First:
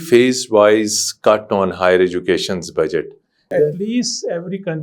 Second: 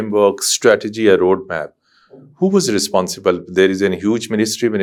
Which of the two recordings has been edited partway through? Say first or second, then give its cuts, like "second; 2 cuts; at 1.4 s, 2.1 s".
first; 1 cut; at 3.5 s